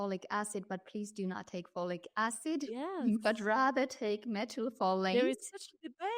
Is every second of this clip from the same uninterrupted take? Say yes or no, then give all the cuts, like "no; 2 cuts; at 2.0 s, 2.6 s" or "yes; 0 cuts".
yes; 0 cuts